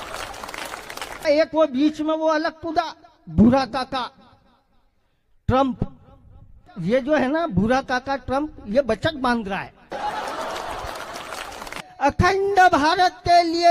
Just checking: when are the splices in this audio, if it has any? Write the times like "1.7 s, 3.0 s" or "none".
1.2 s, 6.7 s, 11.8 s